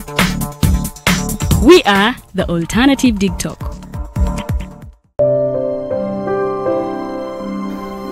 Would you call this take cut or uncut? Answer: cut